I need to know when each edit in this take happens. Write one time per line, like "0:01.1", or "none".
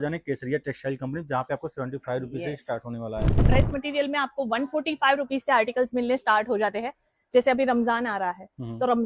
0:03.4